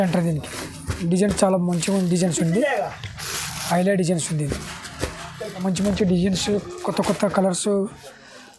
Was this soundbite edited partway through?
yes; 1 cut; at 5.6 s

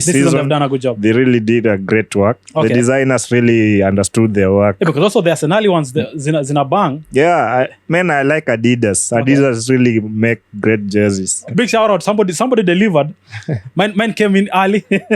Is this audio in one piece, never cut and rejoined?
no; 1 cut; at 11.4 s

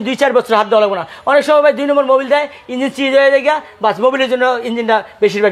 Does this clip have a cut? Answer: no; 0 cuts

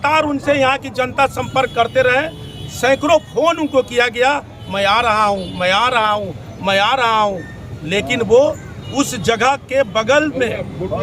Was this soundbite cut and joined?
no; 0 cuts

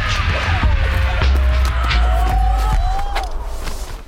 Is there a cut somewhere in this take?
no; 0 cuts

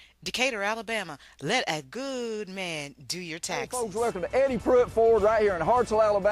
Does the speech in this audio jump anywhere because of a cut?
yes; 1 cut; at 3.8 s

